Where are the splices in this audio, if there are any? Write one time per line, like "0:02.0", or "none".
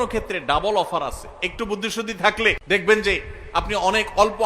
0:02.6